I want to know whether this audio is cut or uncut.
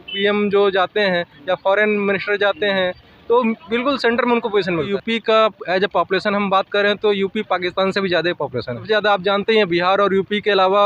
cut